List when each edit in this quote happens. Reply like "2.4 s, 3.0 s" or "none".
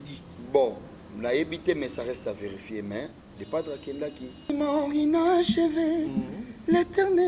4.5 s